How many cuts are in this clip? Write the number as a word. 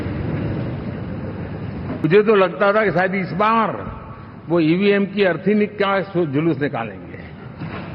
one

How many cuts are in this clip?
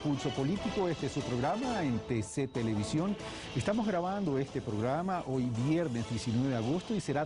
zero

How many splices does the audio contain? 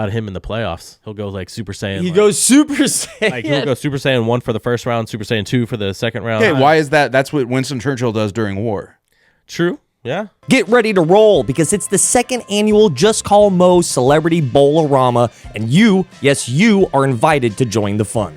three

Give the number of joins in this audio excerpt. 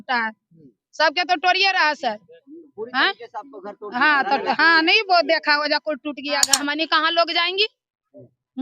one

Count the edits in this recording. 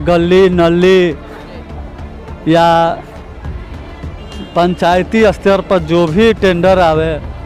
zero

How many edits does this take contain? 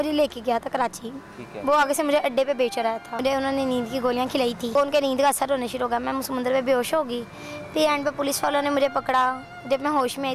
two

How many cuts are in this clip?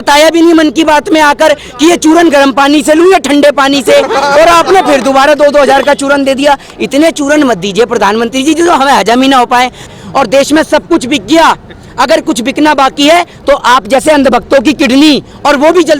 one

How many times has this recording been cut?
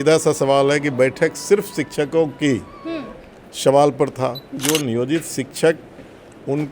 one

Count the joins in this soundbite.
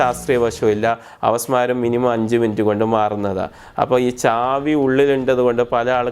zero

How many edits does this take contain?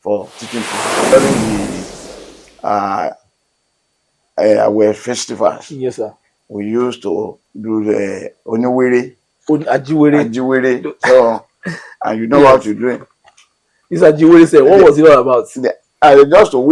one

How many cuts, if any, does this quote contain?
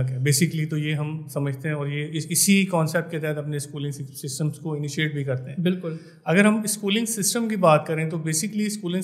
zero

